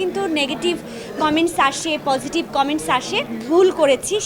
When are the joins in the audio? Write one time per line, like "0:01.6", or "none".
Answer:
0:03.3